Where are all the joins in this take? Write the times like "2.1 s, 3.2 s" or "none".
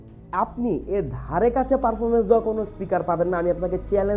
none